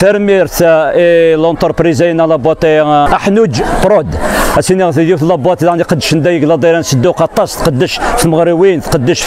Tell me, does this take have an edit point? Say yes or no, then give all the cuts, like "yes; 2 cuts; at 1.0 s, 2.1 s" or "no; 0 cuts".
yes; 1 cut; at 3.6 s